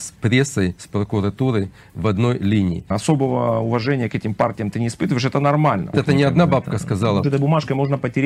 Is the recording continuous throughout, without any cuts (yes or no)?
no